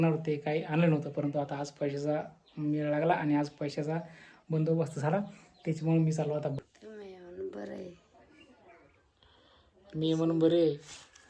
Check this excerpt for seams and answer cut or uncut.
cut